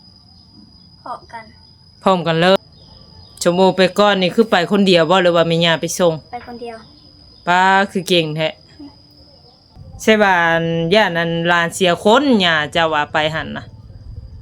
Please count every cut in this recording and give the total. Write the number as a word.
two